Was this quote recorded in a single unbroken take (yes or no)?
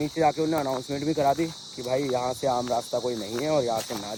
yes